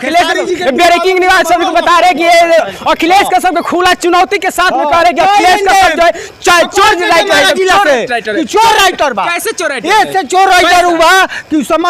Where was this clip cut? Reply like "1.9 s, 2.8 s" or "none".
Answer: none